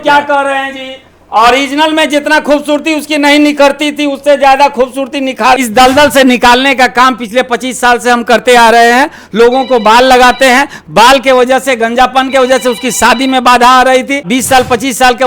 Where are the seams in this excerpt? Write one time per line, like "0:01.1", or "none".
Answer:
0:05.6
0:14.3